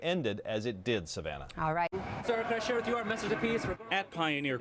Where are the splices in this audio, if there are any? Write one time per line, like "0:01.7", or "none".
0:02.0